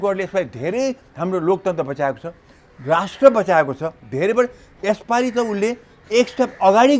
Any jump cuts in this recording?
no; 0 cuts

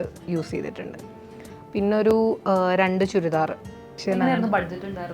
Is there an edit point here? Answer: yes; 1 cut; at 4.0 s

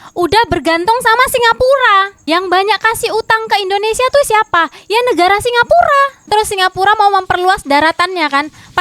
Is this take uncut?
no; 1 cut; at 6.2 s

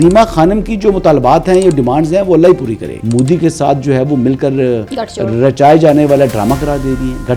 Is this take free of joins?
no; 1 cut; at 2.9 s

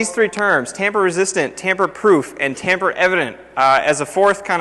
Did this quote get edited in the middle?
no; 0 cuts

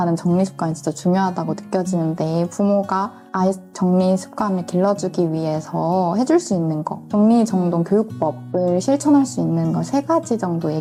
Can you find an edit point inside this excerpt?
no; 0 cuts

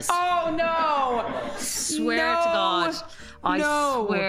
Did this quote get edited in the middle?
no; 0 cuts

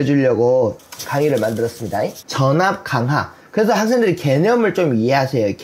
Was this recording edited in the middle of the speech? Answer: yes; 2 cuts; at 0.8 s, 2.2 s

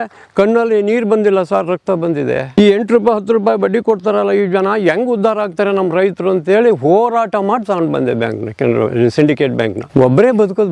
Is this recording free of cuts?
no; 2 cuts; at 2.5 s, 9.8 s

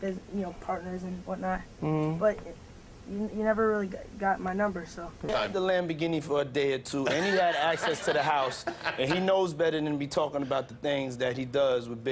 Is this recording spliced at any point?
yes; 1 cut; at 5.1 s

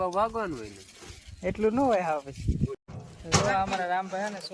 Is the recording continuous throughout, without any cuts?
no; 1 cut; at 2.9 s

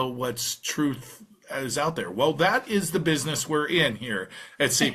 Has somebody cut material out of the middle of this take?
no; 0 cuts

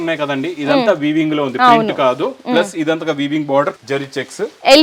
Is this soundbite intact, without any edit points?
no; 1 cut; at 3.8 s

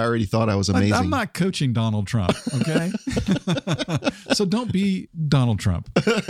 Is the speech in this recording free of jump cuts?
no; 1 cut; at 5.1 s

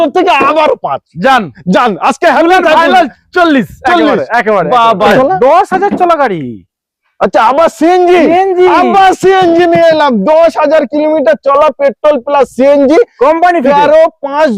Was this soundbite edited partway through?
yes; 1 cut; at 5.1 s

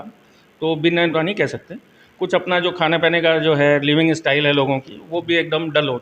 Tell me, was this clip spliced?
yes; 1 cut; at 1.1 s

